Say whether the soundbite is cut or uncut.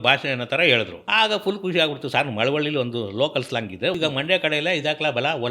cut